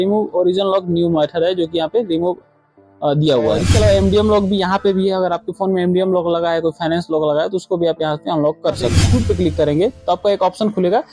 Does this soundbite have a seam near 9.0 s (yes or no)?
yes